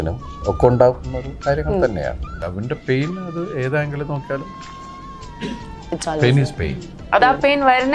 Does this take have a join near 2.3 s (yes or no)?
yes